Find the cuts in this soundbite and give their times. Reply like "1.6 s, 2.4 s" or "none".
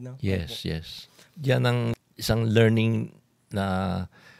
1.9 s